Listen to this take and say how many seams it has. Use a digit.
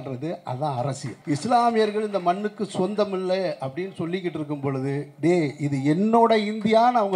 1